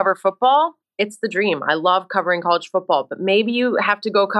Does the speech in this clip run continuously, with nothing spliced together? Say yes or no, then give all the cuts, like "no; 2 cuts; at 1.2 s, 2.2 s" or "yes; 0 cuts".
yes; 0 cuts